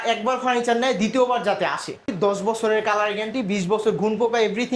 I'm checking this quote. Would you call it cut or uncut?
cut